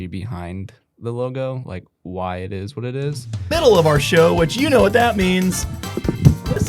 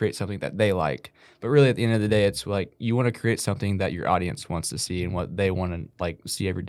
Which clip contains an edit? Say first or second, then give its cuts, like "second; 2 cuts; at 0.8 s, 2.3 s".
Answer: first; 1 cut; at 3.5 s